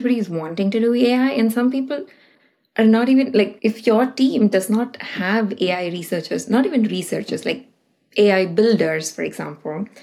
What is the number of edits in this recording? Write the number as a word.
one